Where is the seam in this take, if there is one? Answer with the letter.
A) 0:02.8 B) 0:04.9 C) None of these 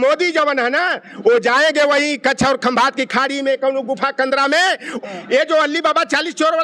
B